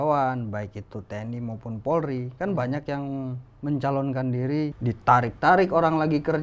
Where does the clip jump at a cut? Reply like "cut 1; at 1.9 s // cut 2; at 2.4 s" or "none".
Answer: cut 1; at 4.8 s